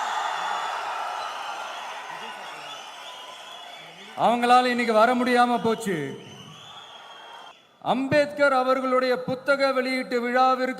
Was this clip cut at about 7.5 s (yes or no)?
yes